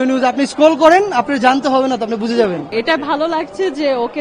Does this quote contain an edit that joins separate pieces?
yes; 1 cut; at 2.7 s

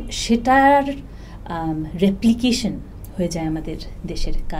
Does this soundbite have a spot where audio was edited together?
no; 0 cuts

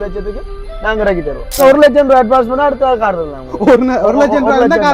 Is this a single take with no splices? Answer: no; 1 cut; at 1.6 s

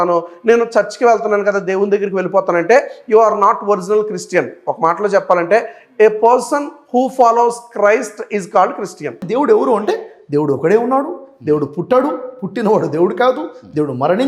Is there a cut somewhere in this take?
yes; 1 cut; at 9.2 s

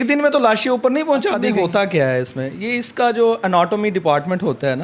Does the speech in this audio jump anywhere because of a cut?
yes; 1 cut; at 1.4 s

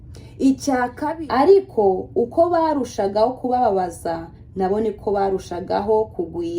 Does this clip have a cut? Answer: yes; 1 cut; at 1.0 s

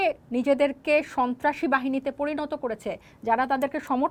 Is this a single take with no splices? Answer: yes; 0 cuts

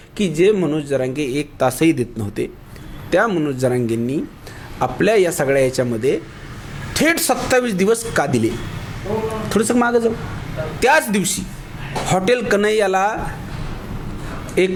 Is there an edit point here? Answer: no; 0 cuts

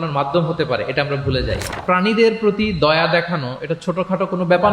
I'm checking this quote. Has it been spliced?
yes; 1 cut; at 1.8 s

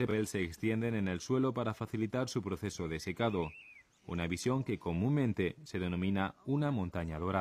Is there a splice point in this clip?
yes; 1 cut; at 1.2 s

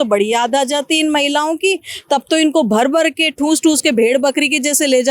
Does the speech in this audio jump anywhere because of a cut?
no; 0 cuts

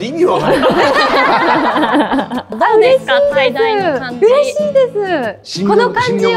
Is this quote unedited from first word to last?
no; 1 cut; at 2.5 s

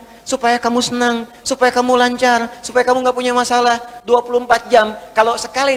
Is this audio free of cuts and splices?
yes; 0 cuts

